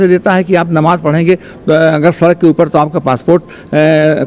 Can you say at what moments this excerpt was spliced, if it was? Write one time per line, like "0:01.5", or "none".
none